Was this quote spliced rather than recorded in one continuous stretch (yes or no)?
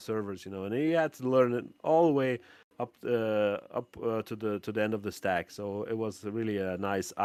no